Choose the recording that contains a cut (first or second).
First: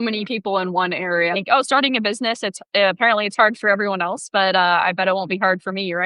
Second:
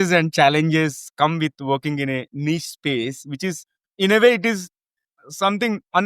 first